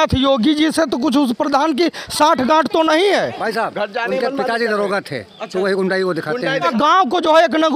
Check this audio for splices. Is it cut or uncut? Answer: cut